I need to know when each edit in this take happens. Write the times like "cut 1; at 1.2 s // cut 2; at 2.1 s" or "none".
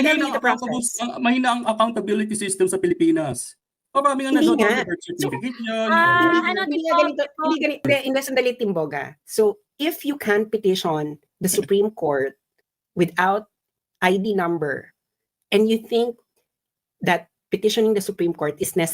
cut 1; at 7.9 s